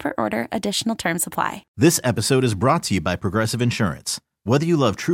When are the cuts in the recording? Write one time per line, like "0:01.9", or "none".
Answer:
0:01.6